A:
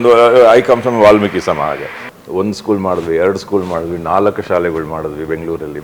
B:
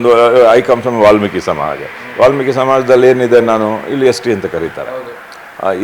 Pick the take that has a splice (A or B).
A